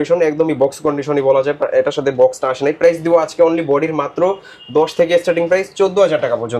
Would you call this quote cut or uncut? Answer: uncut